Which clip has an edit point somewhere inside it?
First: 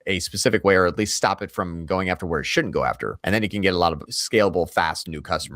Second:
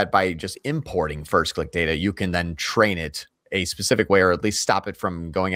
first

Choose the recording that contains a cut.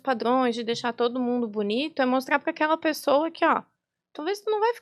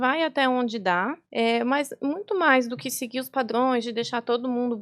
second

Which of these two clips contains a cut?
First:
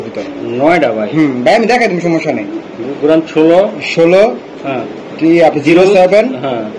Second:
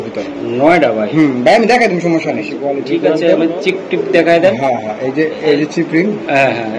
second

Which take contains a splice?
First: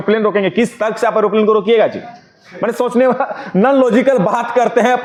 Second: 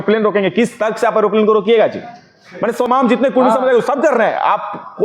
second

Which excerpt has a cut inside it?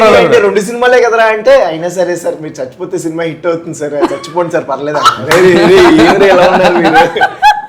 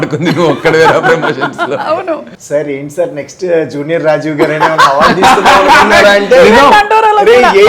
second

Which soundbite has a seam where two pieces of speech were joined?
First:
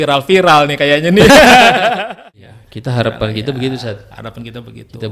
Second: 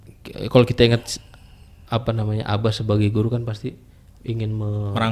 first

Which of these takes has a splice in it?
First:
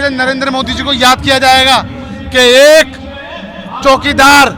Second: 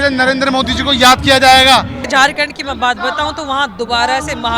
second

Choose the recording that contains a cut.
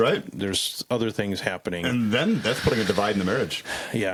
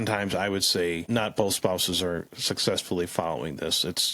second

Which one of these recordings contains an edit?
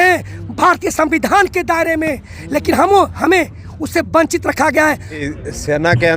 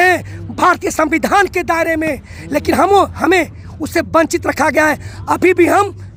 first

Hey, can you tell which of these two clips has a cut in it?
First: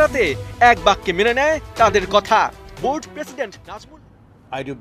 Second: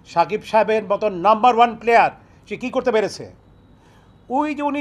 first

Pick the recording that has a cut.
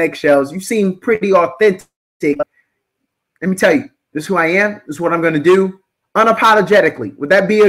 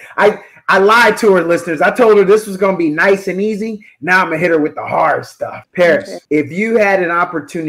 second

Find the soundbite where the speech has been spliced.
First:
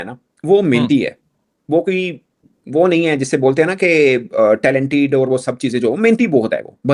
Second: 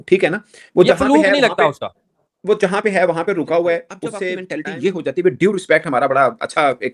second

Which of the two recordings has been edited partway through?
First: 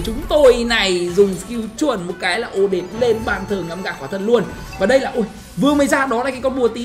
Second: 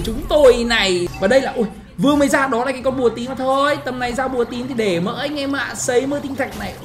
second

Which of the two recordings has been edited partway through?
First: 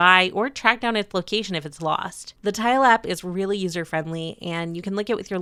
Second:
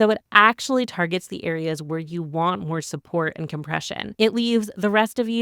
second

